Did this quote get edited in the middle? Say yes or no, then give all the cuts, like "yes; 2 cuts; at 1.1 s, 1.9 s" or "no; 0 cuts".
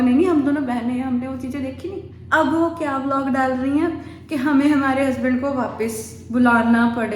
yes; 1 cut; at 2.1 s